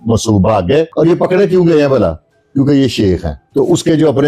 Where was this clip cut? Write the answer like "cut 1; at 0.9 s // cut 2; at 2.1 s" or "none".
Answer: cut 1; at 0.9 s // cut 2; at 3.3 s